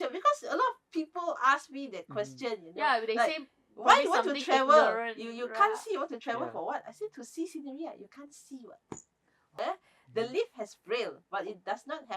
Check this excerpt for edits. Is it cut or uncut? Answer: cut